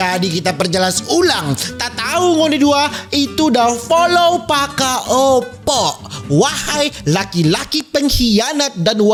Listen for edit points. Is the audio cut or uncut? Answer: uncut